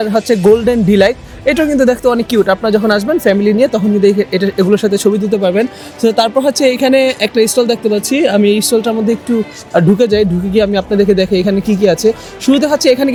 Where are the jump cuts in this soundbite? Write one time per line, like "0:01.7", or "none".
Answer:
none